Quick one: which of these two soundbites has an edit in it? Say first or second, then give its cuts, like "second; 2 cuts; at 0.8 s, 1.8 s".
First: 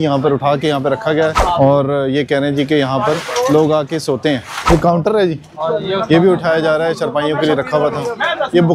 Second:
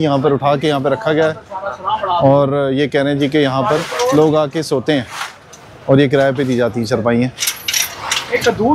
first; 2 cuts; at 1.4 s, 4.7 s